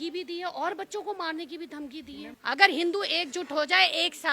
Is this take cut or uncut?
cut